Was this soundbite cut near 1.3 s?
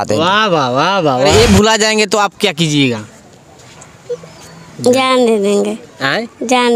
yes; 1 cut; at 1.3 s

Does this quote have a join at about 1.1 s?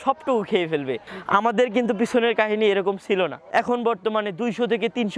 yes; 2 cuts; at 1.1 s, 3.4 s

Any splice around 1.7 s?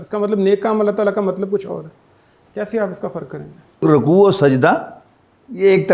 no; 1 cut; at 3.8 s

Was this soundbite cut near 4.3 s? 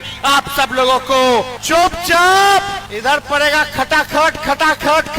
no; 2 cuts; at 1.6 s, 2.8 s

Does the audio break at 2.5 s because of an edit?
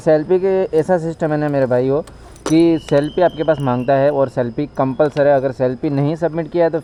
no; 0 cuts

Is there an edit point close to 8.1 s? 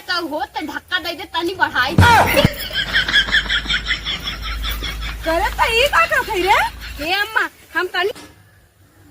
yes; 1 cut; at 8.1 s

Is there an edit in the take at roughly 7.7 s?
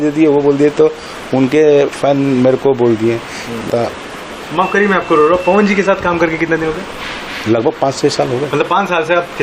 no; 1 cut; at 3.7 s

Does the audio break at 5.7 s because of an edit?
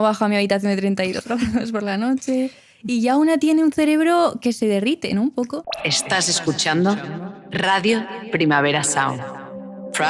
yes; 1 cut; at 5.7 s

